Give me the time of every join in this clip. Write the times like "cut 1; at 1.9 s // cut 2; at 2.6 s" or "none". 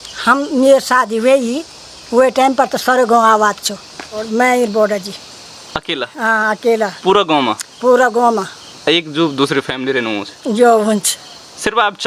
cut 1; at 4.3 s